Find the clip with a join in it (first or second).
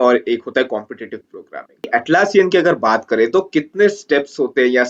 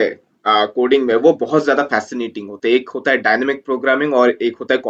first